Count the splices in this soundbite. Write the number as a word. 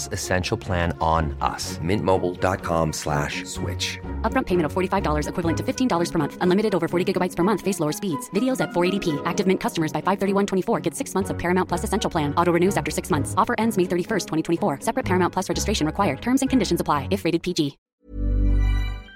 one